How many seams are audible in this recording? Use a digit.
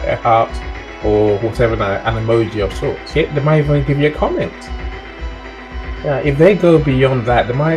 1